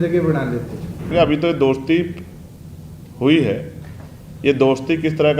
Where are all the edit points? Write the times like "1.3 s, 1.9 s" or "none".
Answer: 1.1 s